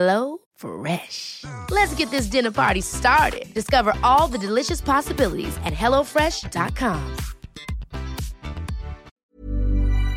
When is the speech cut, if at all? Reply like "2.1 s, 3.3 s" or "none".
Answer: 9.1 s